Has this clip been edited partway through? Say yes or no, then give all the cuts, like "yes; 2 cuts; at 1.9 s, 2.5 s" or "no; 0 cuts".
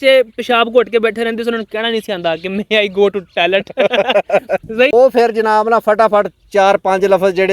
yes; 1 cut; at 4.9 s